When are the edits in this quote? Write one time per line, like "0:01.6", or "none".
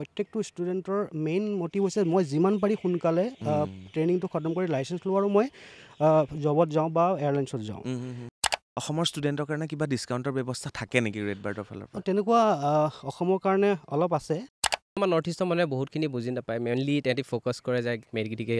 0:08.3
0:15.0